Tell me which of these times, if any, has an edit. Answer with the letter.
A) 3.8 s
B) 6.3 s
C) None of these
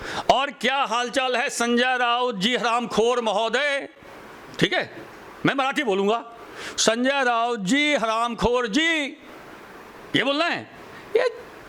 C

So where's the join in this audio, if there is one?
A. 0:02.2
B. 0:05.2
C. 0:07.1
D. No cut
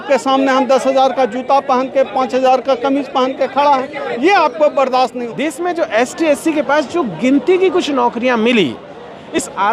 B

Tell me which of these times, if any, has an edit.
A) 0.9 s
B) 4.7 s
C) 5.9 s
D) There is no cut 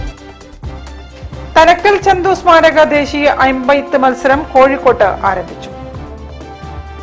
D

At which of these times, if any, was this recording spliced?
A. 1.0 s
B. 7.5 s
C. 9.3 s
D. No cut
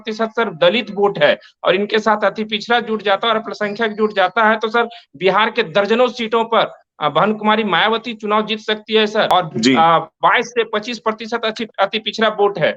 C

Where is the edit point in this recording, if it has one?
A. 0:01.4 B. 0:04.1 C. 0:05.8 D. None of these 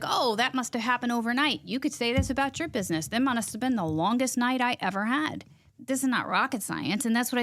C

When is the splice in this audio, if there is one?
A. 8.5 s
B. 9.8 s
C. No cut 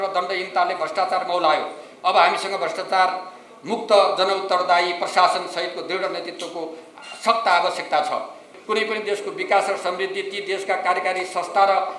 A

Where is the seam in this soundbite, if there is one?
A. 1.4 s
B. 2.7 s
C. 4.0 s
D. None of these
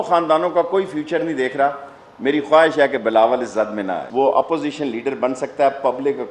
C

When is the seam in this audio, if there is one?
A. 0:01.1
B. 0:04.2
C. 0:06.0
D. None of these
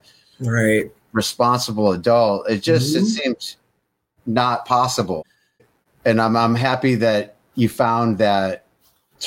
D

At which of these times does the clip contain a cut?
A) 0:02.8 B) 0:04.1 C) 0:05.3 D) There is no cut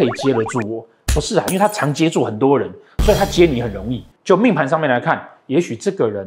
B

